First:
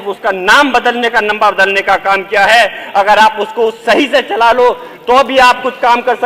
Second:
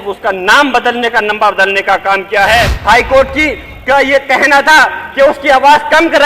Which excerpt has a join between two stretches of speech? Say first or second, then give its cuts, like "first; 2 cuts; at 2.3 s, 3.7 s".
second; 1 cut; at 2.7 s